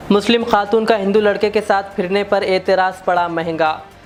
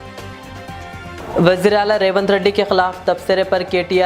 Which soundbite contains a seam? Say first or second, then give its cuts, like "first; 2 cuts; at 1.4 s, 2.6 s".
second; 1 cut; at 1.2 s